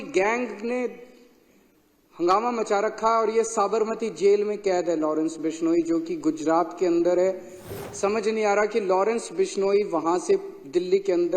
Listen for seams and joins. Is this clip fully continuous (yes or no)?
no